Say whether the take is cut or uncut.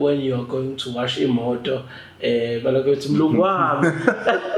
uncut